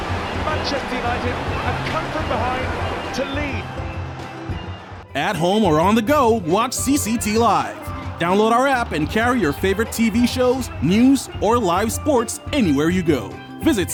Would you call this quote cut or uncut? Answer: uncut